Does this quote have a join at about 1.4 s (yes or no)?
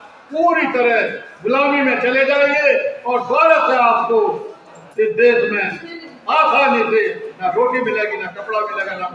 no